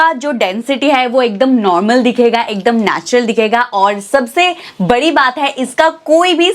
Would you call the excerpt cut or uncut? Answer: uncut